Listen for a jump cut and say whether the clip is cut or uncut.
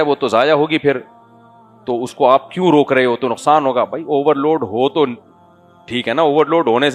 uncut